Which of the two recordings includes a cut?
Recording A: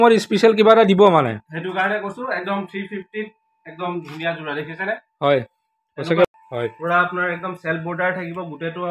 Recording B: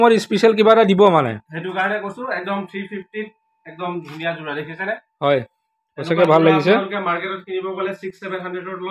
A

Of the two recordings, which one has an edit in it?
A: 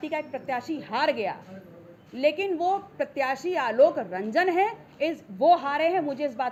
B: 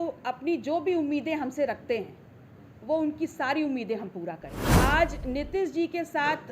B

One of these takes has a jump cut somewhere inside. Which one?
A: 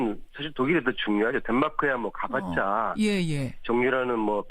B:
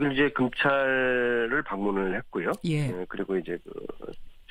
A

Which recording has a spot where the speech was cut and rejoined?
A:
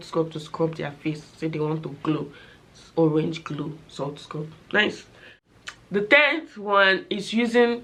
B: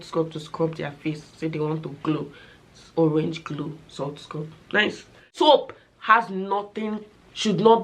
B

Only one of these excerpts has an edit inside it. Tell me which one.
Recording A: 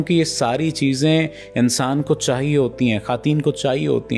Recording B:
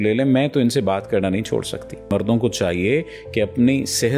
B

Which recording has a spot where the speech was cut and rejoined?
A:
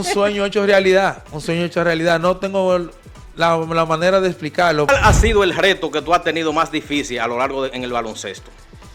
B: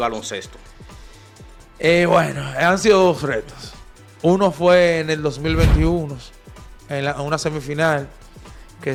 A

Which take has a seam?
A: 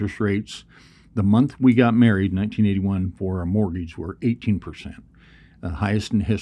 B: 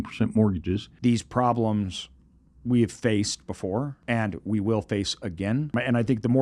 B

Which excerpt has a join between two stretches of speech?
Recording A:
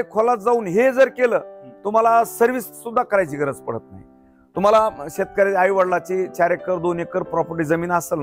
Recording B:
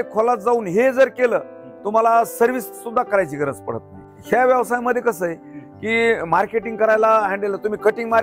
B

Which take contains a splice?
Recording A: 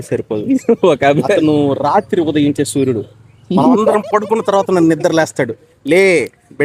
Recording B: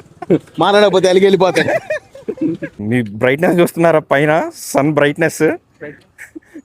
B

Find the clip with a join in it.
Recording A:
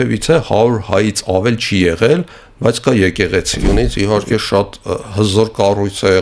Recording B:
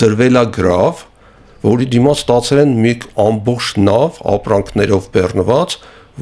A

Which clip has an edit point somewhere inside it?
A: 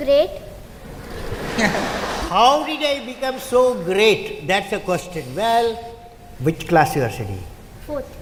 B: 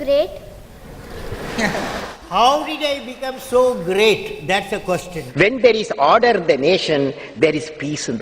B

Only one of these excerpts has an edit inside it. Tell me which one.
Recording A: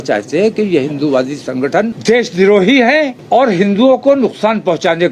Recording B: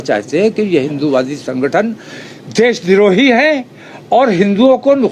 A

